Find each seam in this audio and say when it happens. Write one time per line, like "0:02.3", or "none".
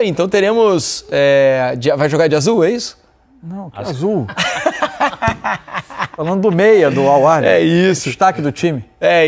none